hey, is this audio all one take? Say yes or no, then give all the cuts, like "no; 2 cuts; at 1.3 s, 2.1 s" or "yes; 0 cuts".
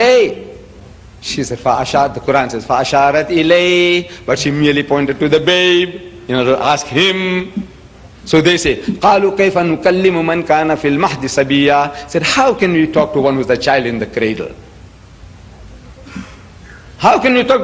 no; 1 cut; at 16.0 s